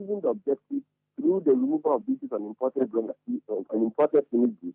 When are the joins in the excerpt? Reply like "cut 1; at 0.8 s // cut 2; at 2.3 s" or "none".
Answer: none